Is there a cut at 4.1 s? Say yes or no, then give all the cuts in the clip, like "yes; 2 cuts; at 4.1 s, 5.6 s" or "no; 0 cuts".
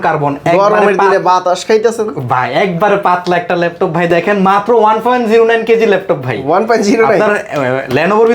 no; 0 cuts